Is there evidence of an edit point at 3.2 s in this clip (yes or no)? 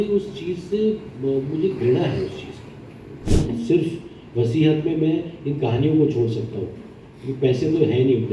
yes